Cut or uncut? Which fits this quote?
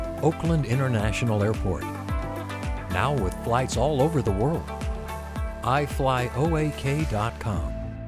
uncut